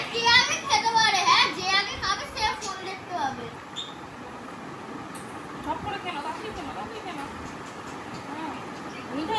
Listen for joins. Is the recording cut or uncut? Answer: uncut